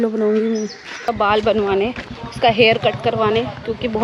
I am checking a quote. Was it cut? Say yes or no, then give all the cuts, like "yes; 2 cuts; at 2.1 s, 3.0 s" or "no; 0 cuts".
yes; 1 cut; at 1.1 s